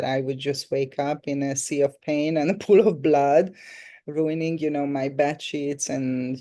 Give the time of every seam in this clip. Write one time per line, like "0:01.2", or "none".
none